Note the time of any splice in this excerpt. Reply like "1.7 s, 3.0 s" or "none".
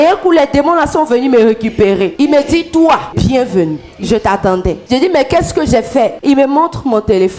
2.1 s, 3.1 s, 4.8 s, 6.2 s